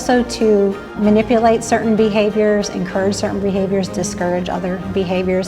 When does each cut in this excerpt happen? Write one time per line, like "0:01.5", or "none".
0:00.9